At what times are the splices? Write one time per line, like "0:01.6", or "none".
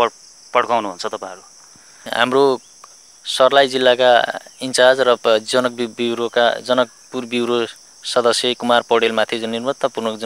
0:02.1

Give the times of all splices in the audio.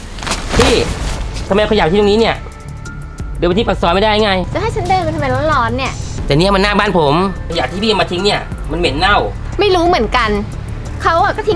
0:04.5
0:06.0
0:07.4
0:09.4

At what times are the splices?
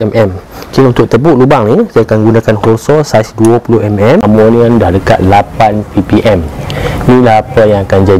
0:04.2
0:06.7

